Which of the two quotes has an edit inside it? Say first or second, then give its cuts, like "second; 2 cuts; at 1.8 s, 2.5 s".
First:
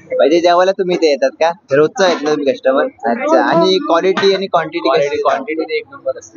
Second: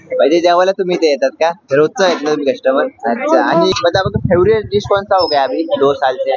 second; 1 cut; at 3.7 s